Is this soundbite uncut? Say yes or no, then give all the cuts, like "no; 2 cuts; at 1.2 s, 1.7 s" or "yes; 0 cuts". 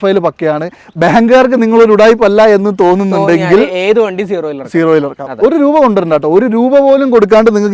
yes; 0 cuts